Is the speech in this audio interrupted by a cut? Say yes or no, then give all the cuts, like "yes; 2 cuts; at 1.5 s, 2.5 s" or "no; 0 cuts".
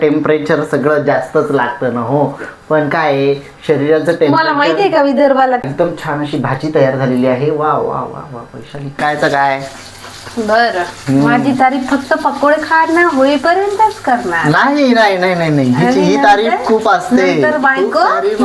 yes; 2 cuts; at 5.6 s, 9.0 s